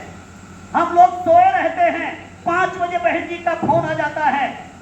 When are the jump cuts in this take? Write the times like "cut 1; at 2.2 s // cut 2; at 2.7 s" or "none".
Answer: none